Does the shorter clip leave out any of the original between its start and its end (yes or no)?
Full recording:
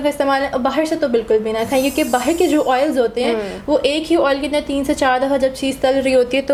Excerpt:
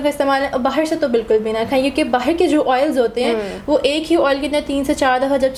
no